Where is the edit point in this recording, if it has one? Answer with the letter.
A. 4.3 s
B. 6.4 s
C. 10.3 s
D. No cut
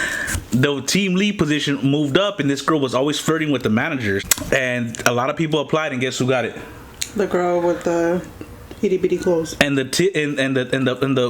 A